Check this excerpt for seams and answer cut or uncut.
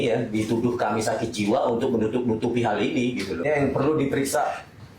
cut